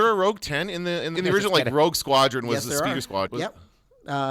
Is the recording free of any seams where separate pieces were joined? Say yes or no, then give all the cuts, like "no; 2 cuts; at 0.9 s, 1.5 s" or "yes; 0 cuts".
no; 2 cuts; at 1.2 s, 3.3 s